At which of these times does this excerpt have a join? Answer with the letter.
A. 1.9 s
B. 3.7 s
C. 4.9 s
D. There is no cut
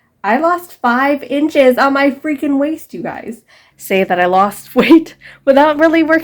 B